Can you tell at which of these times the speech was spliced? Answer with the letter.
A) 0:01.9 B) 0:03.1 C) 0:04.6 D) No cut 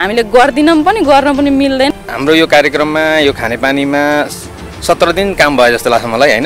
A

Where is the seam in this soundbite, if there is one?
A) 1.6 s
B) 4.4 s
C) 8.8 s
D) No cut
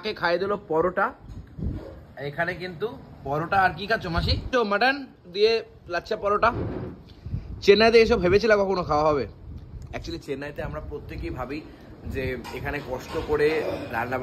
B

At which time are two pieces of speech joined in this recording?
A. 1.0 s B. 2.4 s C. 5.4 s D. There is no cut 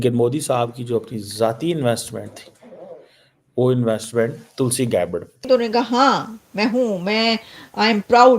C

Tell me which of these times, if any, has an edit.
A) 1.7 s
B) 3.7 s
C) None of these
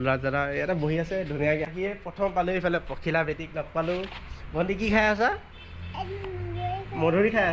A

